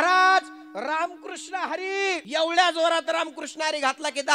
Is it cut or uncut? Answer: cut